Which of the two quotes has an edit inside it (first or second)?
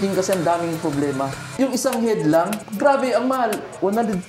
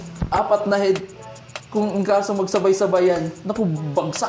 first